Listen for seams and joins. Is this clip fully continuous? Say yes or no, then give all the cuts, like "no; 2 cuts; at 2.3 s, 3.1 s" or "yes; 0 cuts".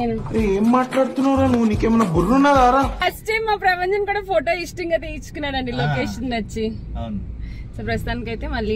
yes; 0 cuts